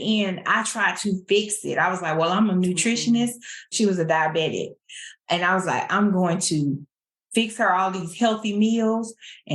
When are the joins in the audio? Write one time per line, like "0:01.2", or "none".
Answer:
0:03.7

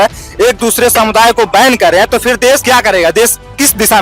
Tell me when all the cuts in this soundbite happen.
0:02.6

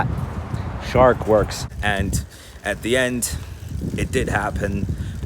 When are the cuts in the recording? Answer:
0:01.6

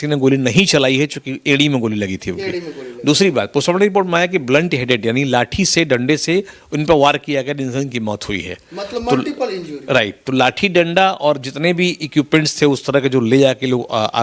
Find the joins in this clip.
none

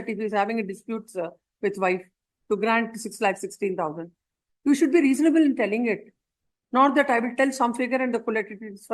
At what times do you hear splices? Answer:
none

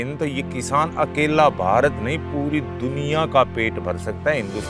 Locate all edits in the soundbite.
none

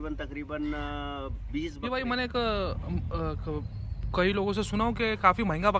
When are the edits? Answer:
0:01.8

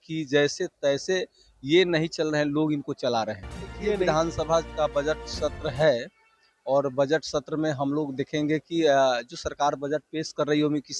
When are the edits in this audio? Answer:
0:03.8

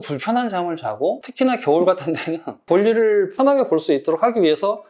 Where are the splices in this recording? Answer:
0:01.2

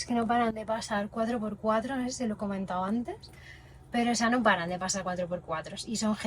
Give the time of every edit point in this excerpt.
none

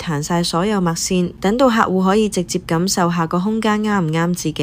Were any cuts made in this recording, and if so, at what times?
0:01.3

